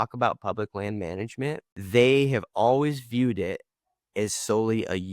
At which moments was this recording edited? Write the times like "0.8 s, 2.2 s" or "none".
1.7 s